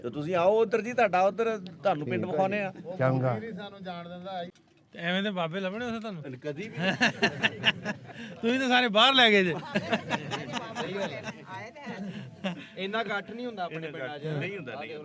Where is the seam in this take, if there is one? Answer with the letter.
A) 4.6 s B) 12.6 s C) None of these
A